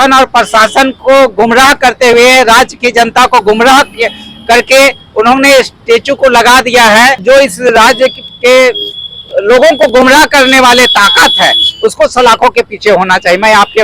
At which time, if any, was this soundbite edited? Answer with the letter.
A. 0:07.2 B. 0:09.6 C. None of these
A